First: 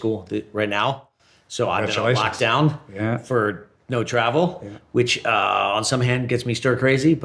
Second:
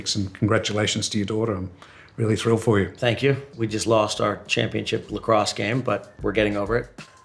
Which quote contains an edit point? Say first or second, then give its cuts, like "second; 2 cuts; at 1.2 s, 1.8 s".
second; 1 cut; at 3.5 s